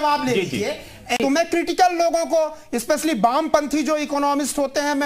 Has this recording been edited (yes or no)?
yes